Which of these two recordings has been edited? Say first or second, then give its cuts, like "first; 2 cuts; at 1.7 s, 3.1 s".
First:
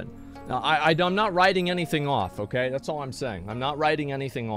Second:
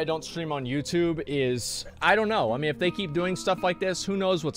second; 1 cut; at 2.0 s